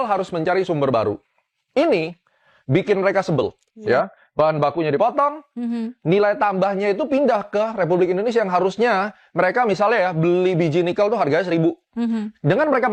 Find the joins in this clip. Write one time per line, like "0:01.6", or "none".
none